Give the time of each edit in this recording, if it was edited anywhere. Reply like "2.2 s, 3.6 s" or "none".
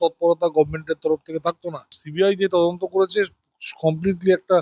2.0 s